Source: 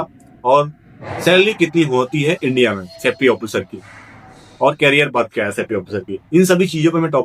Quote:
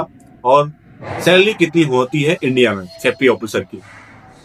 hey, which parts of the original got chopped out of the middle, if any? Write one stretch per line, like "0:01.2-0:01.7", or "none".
none